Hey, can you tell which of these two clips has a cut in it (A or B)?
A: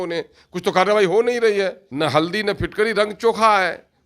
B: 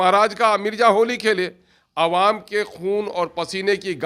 A